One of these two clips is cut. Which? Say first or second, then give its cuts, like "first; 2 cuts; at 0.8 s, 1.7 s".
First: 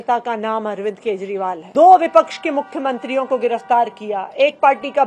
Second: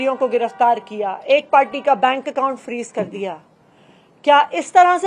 first; 1 cut; at 1.6 s